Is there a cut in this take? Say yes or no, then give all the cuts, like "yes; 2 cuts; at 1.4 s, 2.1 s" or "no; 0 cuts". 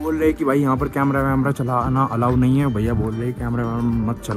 no; 0 cuts